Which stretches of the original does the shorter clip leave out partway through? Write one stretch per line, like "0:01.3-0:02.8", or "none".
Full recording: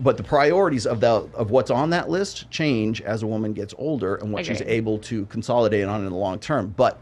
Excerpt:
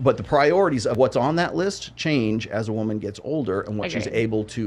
0:00.9-0:01.5

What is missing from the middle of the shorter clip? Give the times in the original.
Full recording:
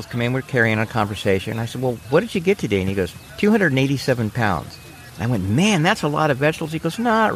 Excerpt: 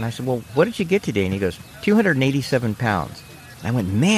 none

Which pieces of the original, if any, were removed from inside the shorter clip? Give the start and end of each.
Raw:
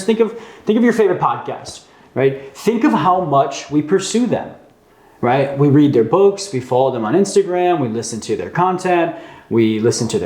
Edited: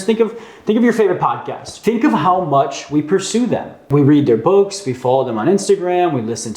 0:01.7-0:02.5
0:04.7-0:05.5

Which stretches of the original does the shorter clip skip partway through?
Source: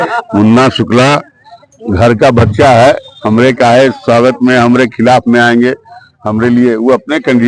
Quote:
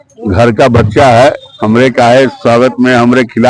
none

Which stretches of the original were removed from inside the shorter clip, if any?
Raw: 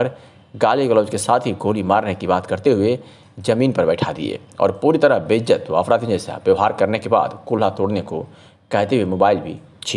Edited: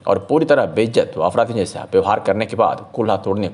none

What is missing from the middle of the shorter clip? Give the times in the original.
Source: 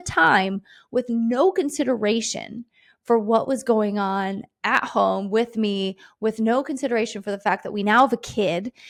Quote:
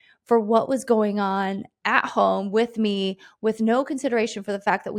none

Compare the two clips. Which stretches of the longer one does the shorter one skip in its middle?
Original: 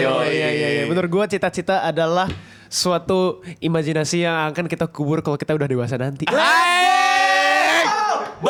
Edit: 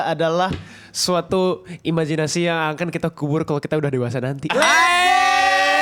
none

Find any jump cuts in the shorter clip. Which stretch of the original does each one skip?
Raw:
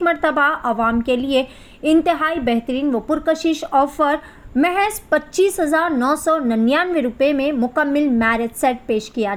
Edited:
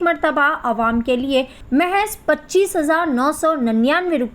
0:01.6-0:04.4

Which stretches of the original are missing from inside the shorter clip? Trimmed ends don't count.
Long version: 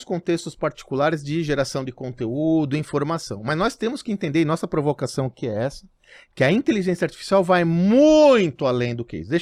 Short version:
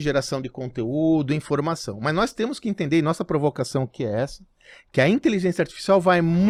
none

